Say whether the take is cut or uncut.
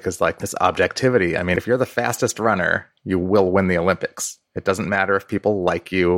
cut